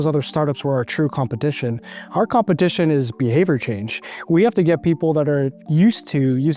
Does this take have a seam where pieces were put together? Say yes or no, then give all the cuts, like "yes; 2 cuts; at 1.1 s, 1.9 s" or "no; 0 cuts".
no; 0 cuts